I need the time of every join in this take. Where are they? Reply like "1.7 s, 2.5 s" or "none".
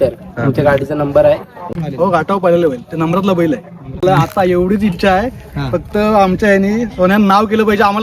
1.8 s, 4.0 s